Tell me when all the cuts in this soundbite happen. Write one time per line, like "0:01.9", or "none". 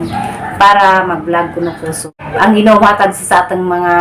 0:02.2